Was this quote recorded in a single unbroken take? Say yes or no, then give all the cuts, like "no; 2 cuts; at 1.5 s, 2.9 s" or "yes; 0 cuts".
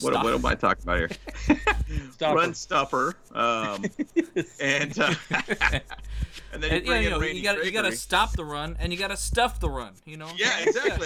yes; 0 cuts